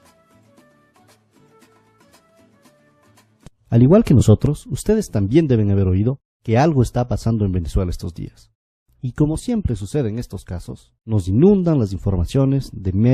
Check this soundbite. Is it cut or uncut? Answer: cut